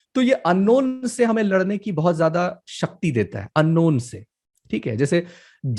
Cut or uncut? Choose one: uncut